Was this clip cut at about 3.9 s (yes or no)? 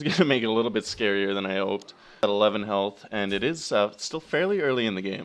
no